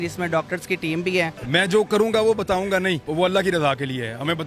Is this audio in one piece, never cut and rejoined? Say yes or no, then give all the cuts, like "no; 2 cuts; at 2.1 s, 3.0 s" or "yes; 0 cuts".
no; 2 cuts; at 1.4 s, 3.1 s